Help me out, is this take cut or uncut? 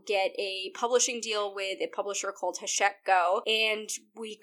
cut